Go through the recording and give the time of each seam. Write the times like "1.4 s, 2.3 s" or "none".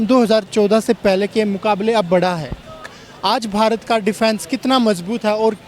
2.9 s